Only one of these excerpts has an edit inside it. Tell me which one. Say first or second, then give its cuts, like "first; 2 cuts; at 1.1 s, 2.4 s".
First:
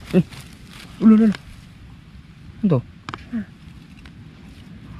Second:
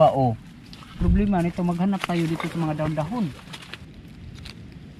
second; 1 cut; at 3.8 s